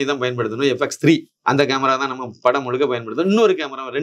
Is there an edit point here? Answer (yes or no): yes